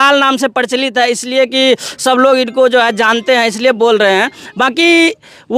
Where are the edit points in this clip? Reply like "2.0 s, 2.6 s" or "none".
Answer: none